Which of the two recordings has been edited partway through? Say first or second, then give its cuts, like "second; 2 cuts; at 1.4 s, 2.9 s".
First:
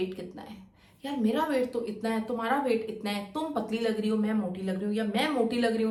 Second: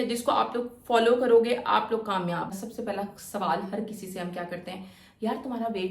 second; 1 cut; at 2.5 s